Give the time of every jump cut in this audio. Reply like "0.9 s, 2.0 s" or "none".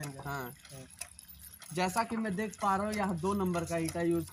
none